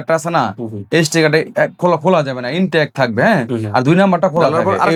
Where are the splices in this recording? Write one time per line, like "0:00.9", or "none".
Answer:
none

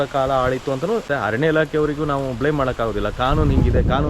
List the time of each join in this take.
0:01.1

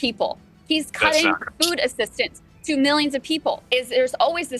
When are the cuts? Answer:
0:03.6

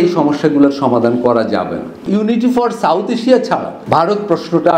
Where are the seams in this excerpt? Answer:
0:02.1
0:03.7

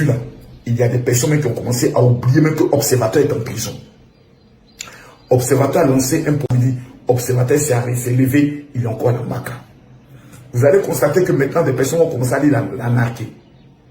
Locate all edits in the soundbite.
0:06.5

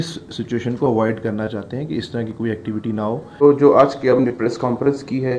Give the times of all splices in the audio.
0:03.4

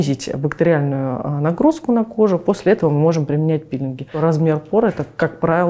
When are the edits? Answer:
0:04.1

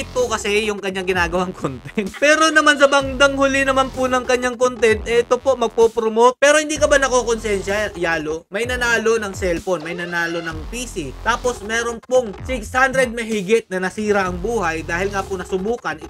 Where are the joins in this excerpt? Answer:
0:02.1
0:06.4

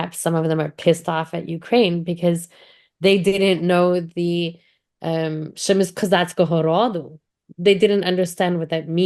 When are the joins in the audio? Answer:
none

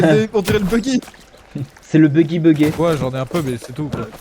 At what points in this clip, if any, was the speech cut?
0:02.8

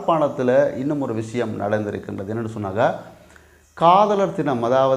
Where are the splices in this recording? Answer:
none

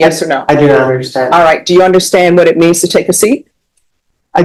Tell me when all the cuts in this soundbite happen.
none

